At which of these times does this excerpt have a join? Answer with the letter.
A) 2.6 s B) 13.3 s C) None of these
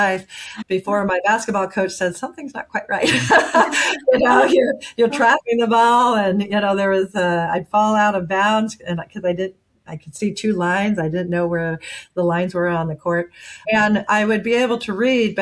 C